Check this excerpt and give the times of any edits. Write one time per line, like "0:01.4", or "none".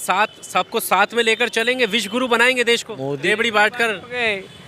0:03.2